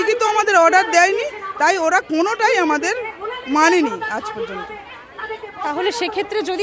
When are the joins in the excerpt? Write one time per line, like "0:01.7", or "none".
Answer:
none